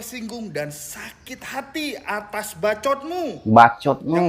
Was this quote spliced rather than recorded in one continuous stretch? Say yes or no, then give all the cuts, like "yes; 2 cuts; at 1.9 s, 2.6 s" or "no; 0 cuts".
yes; 1 cut; at 3.4 s